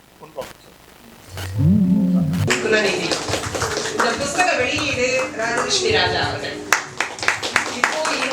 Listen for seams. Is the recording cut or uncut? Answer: cut